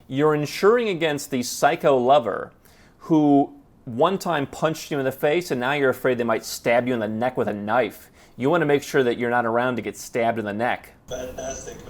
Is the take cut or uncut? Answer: cut